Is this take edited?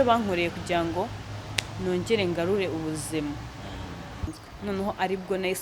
yes; 1 cut; at 4.4 s

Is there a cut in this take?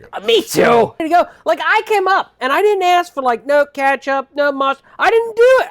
yes; 1 cut; at 1.0 s

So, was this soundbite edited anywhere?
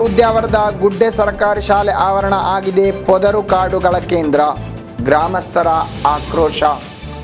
no; 0 cuts

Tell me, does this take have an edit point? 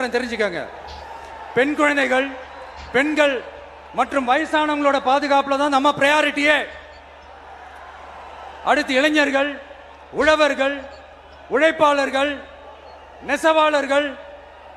no; 0 cuts

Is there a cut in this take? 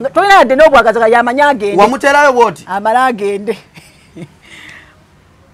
no; 0 cuts

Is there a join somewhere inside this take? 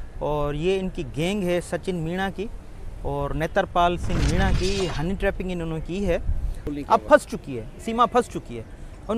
yes; 1 cut; at 6.6 s

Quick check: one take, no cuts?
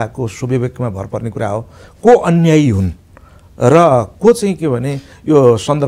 no; 1 cut; at 1.8 s

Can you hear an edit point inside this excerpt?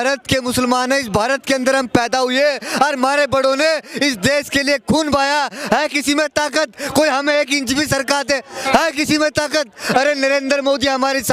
no; 0 cuts

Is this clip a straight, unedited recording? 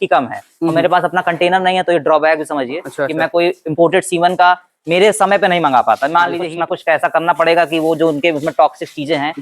no; 1 cut; at 6.5 s

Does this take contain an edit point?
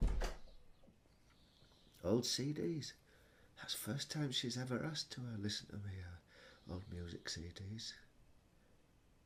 no; 0 cuts

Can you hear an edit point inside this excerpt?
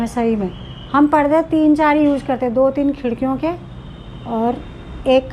no; 0 cuts

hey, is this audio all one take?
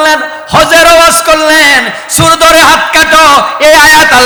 yes; 0 cuts

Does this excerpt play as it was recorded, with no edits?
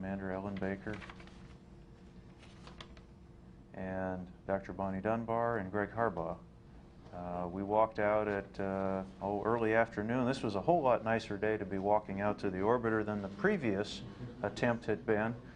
no; 1 cut; at 7.5 s

